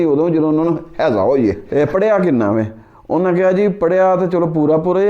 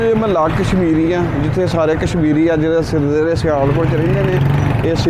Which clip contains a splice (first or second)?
first